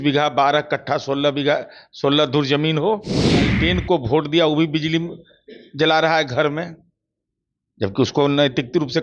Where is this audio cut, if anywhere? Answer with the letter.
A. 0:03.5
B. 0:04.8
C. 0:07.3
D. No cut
A